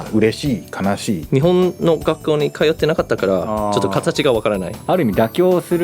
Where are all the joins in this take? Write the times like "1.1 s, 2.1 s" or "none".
1.2 s, 4.7 s